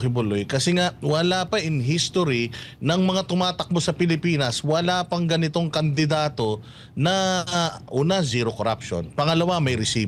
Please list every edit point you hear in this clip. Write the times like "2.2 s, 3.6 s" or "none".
none